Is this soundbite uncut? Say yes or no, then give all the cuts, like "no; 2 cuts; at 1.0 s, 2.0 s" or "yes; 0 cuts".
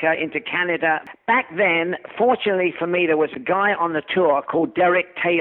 no; 1 cut; at 1.1 s